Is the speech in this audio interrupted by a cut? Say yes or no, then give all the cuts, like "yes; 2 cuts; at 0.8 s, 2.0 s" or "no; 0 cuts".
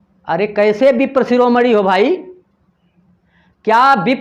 no; 0 cuts